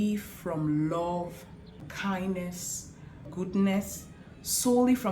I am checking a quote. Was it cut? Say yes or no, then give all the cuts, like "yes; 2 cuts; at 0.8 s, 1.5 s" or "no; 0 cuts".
yes; 2 cuts; at 1.9 s, 3.2 s